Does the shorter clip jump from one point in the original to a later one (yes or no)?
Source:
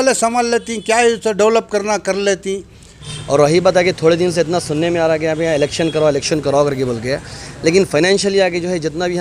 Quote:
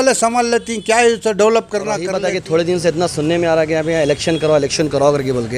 yes